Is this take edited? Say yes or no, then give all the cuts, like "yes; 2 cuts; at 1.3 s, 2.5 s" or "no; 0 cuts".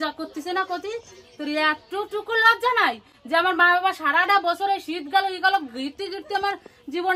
no; 0 cuts